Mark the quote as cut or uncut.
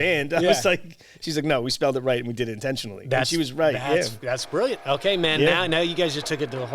uncut